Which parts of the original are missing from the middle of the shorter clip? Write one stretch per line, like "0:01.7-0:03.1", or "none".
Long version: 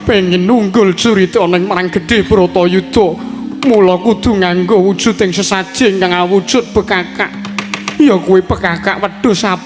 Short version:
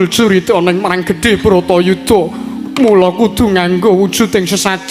none

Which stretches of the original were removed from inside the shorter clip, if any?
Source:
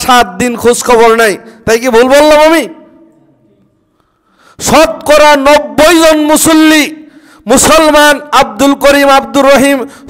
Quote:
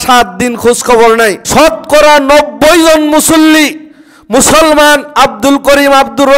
0:01.4-0:04.6

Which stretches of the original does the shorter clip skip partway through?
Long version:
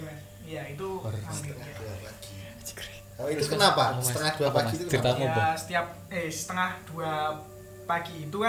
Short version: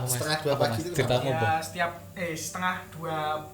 none

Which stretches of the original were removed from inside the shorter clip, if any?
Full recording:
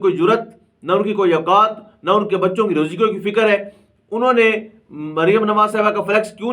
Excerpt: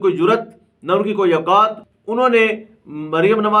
0:01.9-0:03.9

